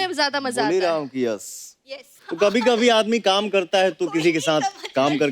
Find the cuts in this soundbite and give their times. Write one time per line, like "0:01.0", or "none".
0:02.1